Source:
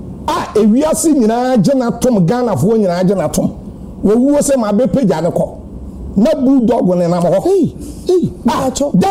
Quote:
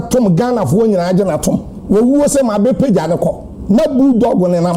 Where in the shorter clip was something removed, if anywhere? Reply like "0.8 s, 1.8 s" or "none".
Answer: 1.7 s, 3.5 s

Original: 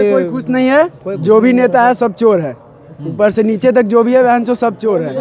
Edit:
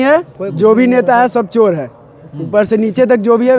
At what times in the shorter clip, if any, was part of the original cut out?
none

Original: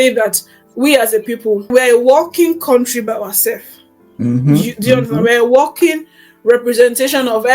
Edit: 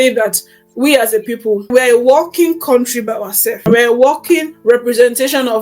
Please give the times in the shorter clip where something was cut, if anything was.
3.6 s, 4.5 s

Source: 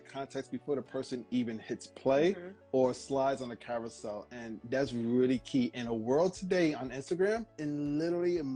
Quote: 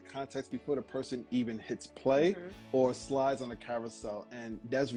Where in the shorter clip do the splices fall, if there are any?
none

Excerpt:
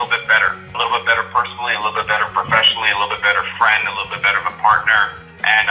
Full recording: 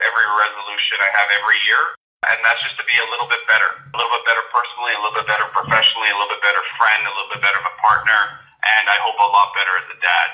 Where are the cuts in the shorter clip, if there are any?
none

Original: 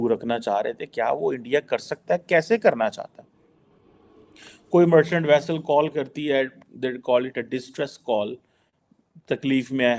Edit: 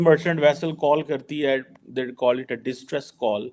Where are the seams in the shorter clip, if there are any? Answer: none

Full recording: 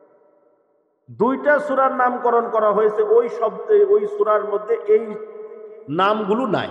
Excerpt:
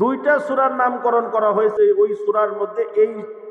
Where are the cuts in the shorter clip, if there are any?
1.7 s

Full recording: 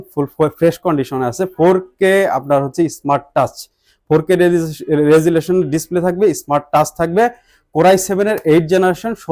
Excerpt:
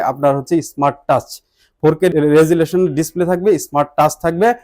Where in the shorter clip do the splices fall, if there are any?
2.1 s

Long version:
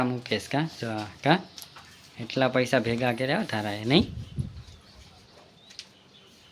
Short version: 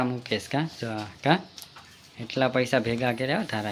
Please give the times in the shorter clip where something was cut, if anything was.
none

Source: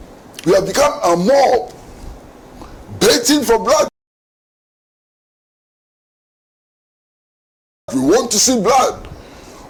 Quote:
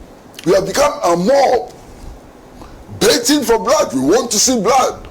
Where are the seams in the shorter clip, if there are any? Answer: 3.9 s

